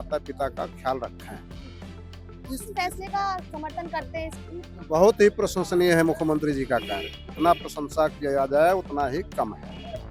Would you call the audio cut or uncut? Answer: uncut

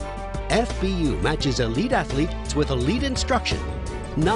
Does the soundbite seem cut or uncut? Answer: uncut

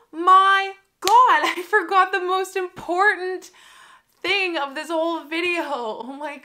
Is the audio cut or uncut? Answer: uncut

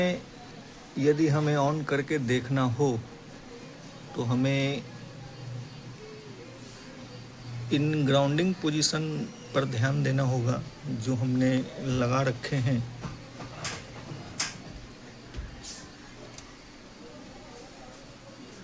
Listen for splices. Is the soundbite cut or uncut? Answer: uncut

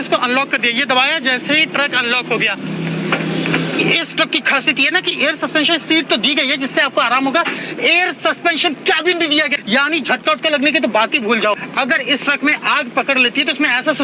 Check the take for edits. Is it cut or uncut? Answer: uncut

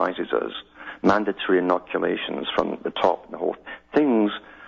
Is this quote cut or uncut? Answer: uncut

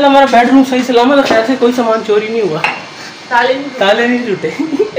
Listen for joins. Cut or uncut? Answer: uncut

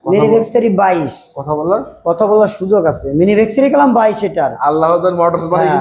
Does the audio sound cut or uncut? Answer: uncut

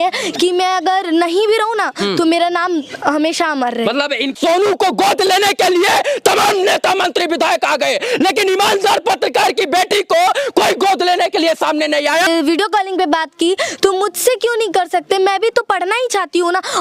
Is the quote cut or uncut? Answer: cut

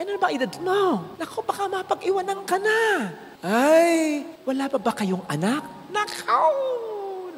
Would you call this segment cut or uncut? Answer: uncut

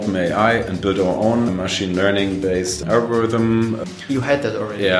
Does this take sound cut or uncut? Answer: cut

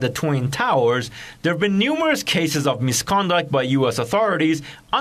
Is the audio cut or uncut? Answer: uncut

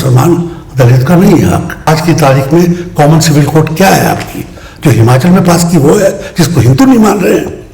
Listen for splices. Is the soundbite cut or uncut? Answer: cut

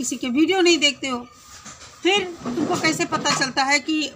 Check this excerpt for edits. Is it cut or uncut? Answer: uncut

